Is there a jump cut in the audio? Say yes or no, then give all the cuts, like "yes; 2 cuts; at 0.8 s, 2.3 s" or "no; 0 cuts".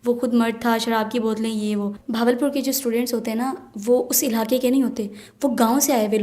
yes; 1 cut; at 2.0 s